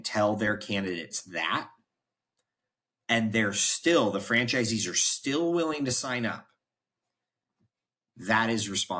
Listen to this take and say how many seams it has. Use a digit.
0